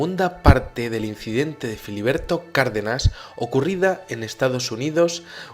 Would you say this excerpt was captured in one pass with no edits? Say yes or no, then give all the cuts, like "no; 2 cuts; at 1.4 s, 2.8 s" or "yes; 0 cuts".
no; 1 cut; at 1.5 s